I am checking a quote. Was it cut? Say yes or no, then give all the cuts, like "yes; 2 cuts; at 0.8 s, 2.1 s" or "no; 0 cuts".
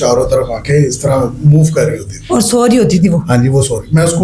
no; 0 cuts